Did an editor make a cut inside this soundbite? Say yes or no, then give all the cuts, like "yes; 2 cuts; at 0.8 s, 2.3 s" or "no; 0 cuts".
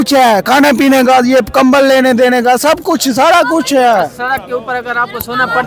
no; 0 cuts